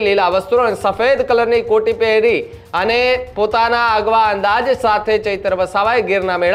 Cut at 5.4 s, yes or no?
no